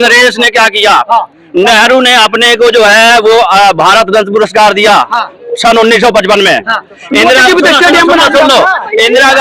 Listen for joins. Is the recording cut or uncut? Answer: uncut